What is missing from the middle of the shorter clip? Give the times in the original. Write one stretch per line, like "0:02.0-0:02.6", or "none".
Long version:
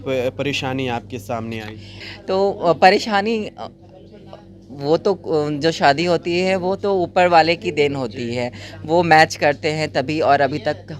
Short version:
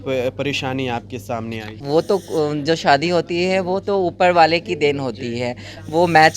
0:01.7-0:04.7